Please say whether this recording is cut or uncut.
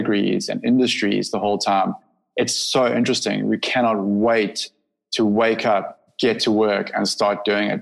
cut